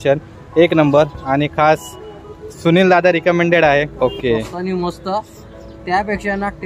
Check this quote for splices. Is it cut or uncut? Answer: cut